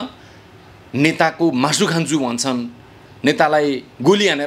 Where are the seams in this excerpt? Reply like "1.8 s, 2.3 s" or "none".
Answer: none